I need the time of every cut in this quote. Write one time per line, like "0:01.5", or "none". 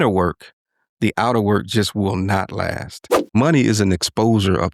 0:03.3

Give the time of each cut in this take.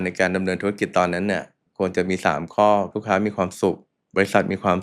0:01.6
0:03.0
0:03.9

